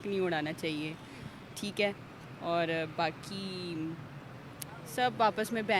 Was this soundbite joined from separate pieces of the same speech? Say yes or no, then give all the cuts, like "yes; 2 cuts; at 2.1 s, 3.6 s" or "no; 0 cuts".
no; 0 cuts